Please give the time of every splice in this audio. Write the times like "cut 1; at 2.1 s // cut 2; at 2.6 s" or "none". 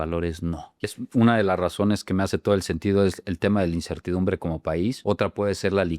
cut 1; at 0.9 s // cut 2; at 5.0 s